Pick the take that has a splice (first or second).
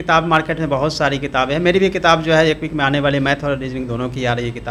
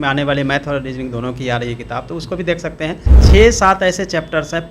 second